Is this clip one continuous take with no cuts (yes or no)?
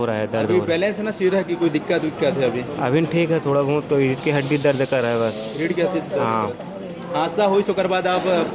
yes